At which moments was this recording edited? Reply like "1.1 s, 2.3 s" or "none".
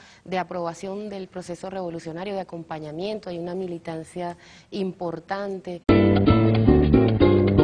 none